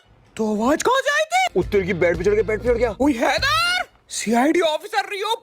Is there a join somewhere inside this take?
yes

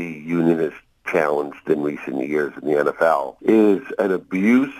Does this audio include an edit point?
yes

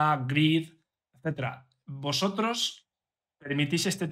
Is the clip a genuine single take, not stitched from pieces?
yes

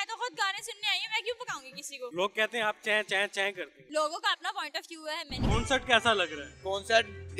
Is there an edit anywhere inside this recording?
yes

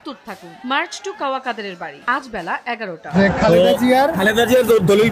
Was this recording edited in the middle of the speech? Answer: yes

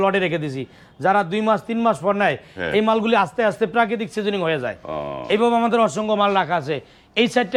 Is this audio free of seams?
yes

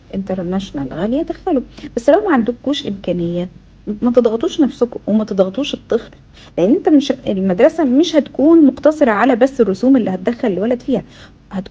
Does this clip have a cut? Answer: no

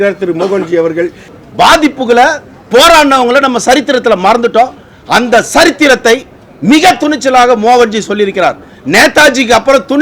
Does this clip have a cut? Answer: yes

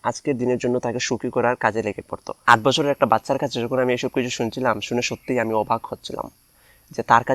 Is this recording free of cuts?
no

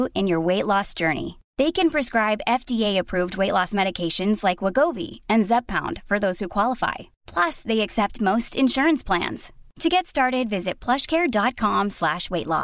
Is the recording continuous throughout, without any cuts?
yes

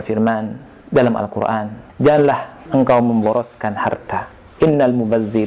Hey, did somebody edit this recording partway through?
yes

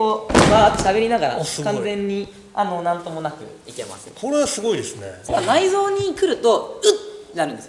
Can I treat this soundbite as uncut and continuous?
no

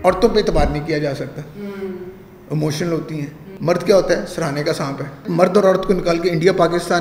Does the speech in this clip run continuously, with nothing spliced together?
no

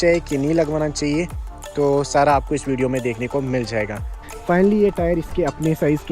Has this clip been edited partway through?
yes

